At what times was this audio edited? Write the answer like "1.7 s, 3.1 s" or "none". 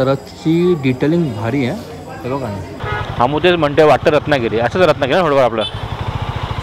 2.8 s